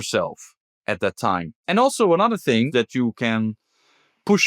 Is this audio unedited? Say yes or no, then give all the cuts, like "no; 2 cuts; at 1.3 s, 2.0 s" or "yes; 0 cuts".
no; 2 cuts; at 1.6 s, 2.7 s